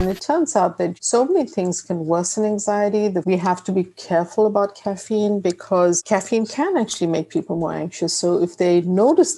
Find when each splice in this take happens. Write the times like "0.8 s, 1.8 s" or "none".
1.0 s, 3.2 s